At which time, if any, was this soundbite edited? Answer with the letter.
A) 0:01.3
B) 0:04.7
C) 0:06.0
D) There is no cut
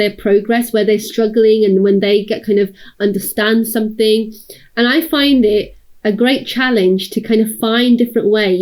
D